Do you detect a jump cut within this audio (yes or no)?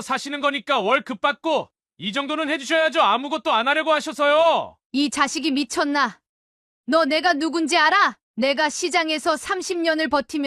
yes